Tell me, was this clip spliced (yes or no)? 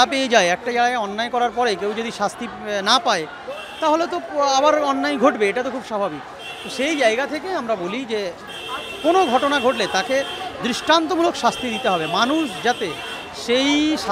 no